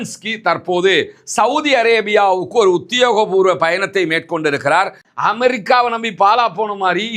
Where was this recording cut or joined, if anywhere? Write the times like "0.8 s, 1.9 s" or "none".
5.0 s